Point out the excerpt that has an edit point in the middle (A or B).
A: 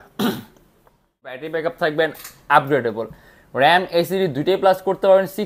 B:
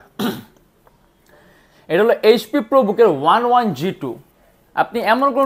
A